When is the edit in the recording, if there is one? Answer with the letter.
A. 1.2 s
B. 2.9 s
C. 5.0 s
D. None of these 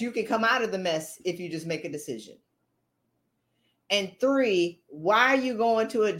D